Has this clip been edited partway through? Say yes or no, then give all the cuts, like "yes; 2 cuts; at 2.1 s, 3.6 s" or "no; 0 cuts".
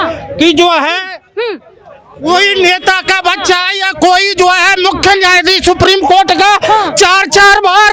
no; 0 cuts